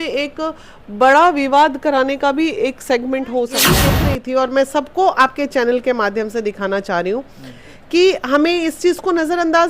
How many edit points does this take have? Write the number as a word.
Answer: one